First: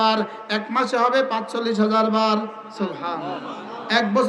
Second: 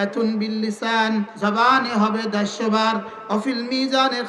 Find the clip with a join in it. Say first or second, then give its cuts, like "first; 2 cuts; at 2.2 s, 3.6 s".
second; 1 cut; at 1.3 s